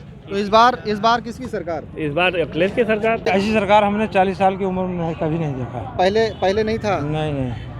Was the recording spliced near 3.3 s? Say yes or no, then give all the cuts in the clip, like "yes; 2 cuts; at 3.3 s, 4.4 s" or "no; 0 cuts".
yes; 1 cut; at 3.3 s